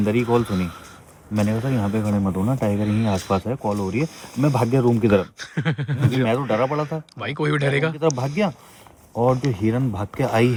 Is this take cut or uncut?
uncut